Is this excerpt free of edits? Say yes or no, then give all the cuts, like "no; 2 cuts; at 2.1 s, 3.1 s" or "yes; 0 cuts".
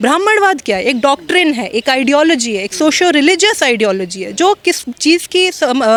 yes; 0 cuts